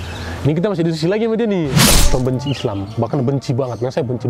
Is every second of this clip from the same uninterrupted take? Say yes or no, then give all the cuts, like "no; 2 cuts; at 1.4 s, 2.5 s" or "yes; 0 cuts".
no; 1 cut; at 1.9 s